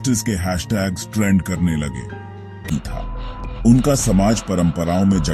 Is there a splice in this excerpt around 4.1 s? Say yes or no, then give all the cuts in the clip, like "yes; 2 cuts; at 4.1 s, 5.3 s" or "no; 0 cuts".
no; 1 cut; at 2.7 s